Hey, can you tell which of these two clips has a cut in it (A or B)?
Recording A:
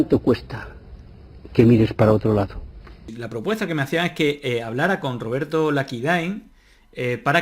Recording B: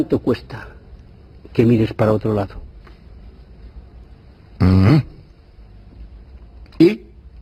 A